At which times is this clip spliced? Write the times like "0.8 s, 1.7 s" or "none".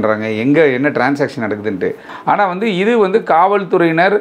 2.1 s